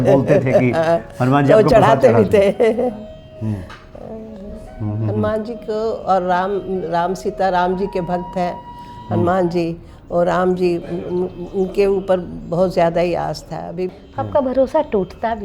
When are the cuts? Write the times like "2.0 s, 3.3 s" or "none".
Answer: 13.8 s